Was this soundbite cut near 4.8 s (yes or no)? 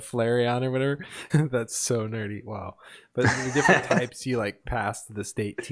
no